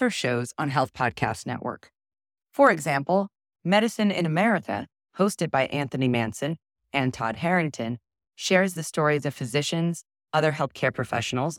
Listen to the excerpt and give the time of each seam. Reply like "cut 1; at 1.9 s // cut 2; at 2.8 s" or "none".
none